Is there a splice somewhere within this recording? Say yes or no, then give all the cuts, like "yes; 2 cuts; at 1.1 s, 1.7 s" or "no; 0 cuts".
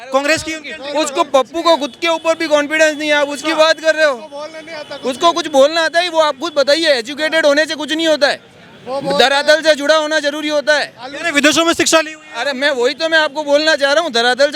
no; 0 cuts